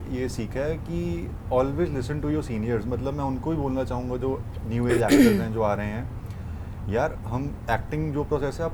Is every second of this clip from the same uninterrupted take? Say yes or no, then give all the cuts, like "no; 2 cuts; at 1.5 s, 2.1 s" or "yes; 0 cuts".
yes; 0 cuts